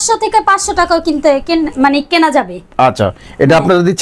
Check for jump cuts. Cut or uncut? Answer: uncut